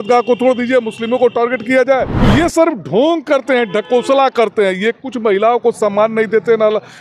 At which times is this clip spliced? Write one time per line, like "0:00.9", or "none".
0:02.1